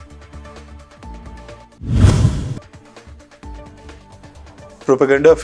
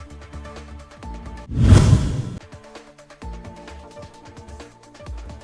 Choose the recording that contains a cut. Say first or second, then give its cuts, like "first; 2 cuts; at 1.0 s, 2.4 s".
first; 1 cut; at 1.4 s